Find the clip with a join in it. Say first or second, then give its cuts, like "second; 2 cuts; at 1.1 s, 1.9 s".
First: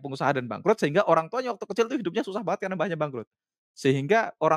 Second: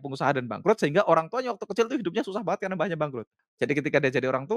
second; 1 cut; at 3.4 s